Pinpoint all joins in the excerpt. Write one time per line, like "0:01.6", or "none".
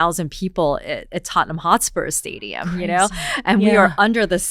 none